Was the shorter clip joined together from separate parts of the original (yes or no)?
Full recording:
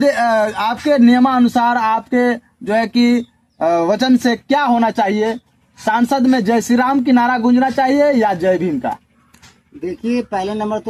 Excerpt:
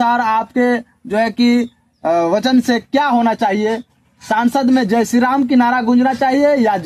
no